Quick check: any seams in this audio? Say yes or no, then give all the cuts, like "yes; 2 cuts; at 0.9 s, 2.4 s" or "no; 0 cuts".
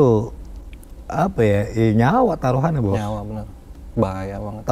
no; 0 cuts